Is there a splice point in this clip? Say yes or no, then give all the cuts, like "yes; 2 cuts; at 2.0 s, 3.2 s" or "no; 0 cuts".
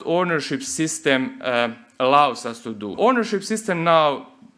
yes; 1 cut; at 2.9 s